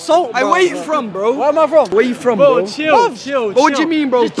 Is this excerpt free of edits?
yes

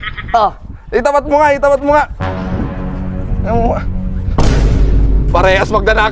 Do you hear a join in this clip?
no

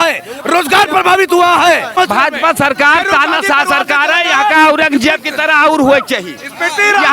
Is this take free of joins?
no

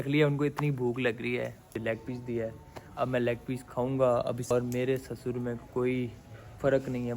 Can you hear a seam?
yes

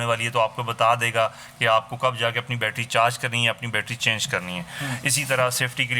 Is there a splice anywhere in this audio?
no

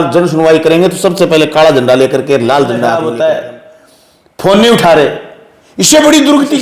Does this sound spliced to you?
yes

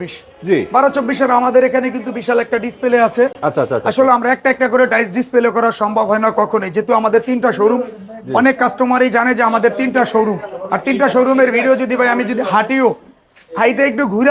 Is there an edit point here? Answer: no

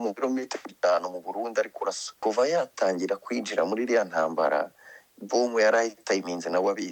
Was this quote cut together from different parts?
yes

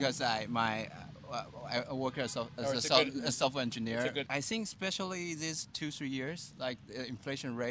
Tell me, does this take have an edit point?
yes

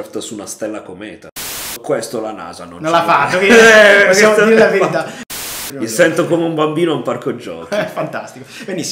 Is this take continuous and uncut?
no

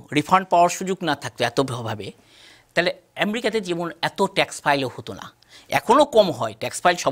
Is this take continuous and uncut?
yes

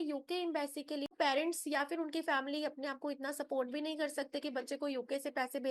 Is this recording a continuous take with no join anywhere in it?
no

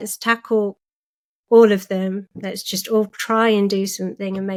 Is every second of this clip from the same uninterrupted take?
yes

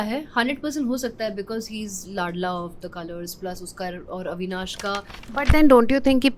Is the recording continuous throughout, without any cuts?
no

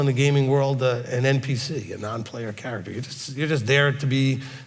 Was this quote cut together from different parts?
no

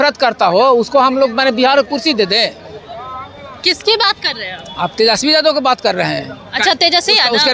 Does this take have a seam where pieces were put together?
no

